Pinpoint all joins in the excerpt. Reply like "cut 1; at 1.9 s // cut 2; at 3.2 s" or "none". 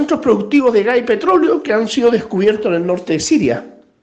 none